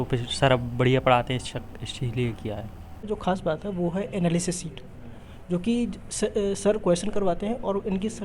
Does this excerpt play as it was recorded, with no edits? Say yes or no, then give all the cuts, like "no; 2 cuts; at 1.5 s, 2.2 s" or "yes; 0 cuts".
no; 1 cut; at 3.0 s